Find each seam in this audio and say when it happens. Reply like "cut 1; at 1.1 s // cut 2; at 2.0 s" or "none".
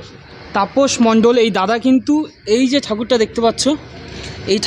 none